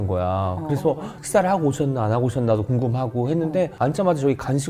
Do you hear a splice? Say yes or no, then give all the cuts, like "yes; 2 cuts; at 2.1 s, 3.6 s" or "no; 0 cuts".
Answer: yes; 2 cuts; at 1.1 s, 3.7 s